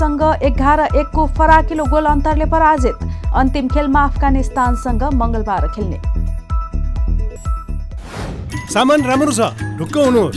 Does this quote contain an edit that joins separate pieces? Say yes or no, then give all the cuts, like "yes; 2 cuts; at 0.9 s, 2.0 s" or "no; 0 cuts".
yes; 1 cut; at 8.5 s